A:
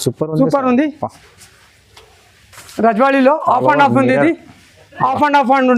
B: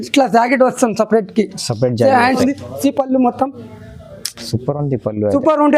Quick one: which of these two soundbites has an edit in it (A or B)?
B